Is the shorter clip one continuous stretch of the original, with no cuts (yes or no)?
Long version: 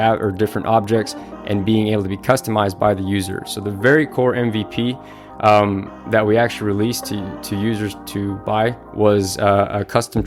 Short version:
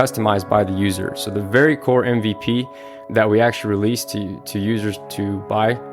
no